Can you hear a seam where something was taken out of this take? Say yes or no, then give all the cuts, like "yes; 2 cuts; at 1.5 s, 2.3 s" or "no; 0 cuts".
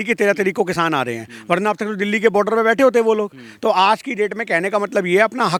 no; 0 cuts